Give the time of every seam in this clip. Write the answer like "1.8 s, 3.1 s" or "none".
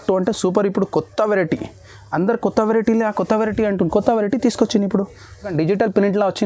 5.5 s